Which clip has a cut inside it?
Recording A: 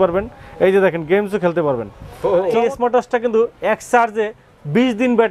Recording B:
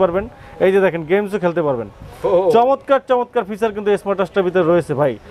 A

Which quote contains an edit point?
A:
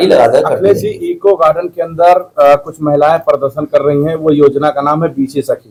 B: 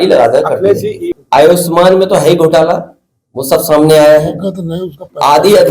B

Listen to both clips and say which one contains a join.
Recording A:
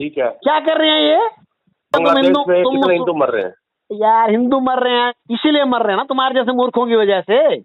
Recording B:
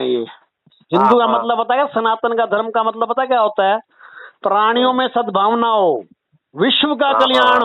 A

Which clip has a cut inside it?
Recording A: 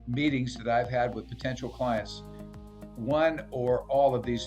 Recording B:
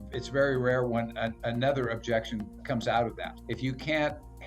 B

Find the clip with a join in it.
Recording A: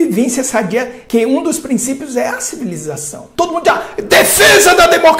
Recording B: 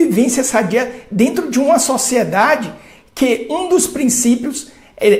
A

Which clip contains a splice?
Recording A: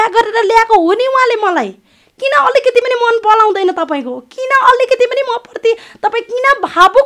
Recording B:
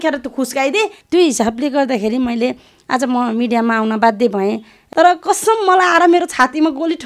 B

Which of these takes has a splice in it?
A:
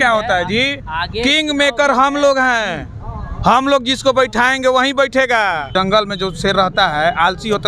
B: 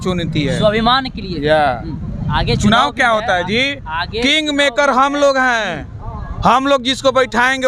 A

